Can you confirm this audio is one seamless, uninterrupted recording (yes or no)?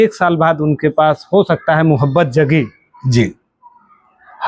yes